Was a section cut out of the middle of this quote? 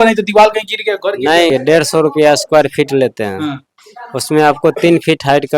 yes; 1 cut; at 1.5 s

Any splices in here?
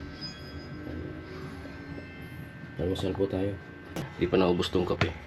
yes; 1 cut; at 4.0 s

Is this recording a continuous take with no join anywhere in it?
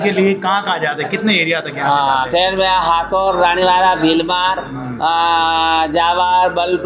yes; 0 cuts

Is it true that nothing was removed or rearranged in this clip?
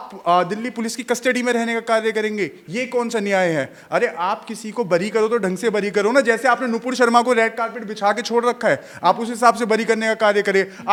yes; 0 cuts

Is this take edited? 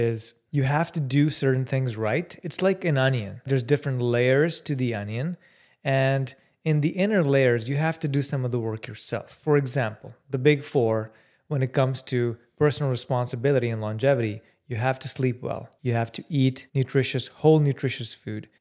no; 0 cuts

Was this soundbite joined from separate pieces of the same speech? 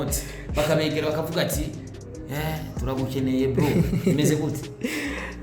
no; 0 cuts

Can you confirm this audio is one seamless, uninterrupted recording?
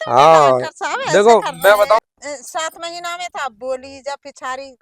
no; 1 cut; at 2.0 s

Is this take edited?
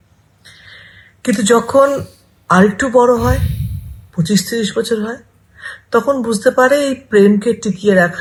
no; 0 cuts

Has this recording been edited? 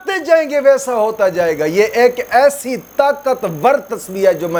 no; 0 cuts

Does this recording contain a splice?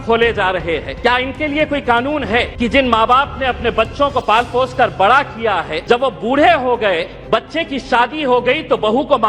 yes; 4 cuts; at 0.9 s, 2.5 s, 5.7 s, 7.1 s

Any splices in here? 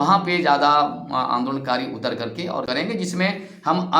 yes; 1 cut; at 2.7 s

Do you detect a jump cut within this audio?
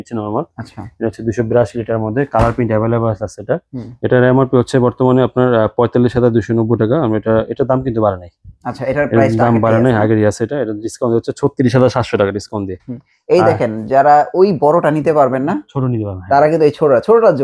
no; 0 cuts

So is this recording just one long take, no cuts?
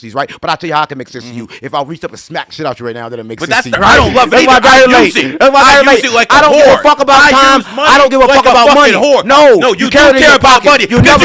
no; 1 cut; at 3.7 s

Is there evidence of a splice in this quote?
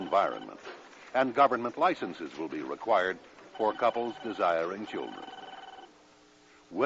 yes; 1 cut; at 4.1 s

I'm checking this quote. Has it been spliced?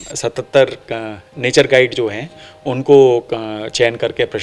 no; 0 cuts

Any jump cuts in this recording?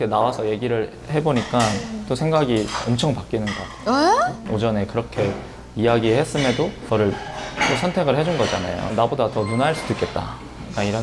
yes; 3 cuts; at 4.4 s, 6.8 s, 8.9 s

